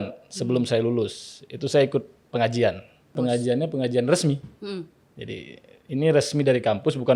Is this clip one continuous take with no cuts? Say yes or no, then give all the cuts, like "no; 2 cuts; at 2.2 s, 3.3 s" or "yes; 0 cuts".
yes; 0 cuts